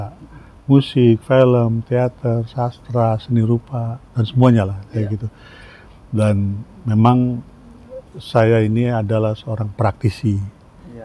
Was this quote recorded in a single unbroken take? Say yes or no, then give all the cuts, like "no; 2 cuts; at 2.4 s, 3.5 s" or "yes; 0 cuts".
yes; 0 cuts